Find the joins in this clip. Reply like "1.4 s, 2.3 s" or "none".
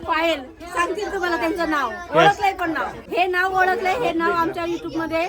2.9 s